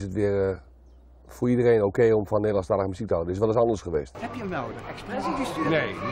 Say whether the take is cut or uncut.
cut